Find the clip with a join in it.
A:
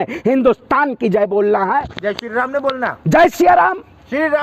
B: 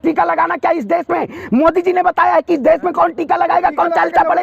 A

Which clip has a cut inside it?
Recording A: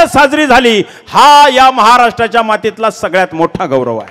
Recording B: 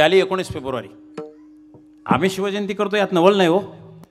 B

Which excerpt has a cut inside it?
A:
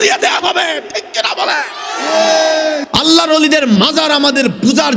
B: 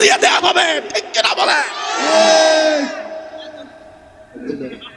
A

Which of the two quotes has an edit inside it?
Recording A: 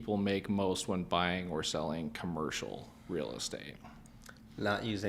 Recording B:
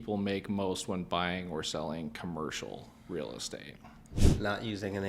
B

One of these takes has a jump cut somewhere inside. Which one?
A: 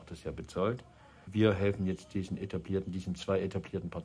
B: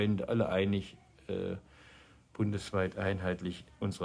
A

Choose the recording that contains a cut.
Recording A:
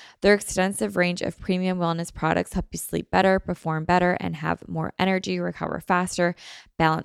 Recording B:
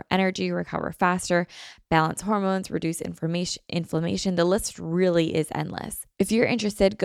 B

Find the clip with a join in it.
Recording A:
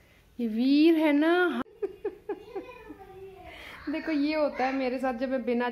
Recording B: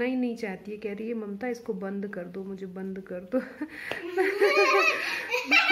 A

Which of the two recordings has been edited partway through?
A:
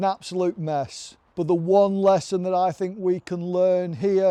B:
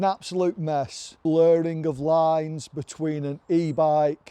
B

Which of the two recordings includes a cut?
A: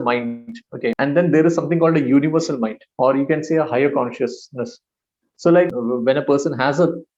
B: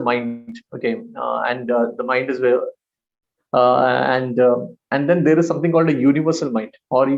A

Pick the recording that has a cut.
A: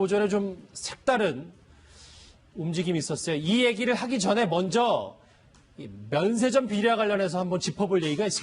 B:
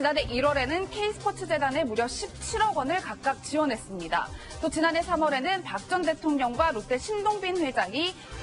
B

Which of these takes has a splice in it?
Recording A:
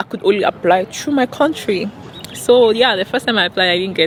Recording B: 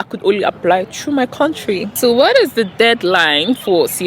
B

